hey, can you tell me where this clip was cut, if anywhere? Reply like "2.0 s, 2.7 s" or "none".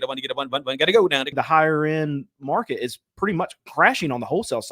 1.3 s